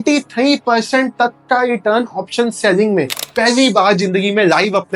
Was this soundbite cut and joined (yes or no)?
yes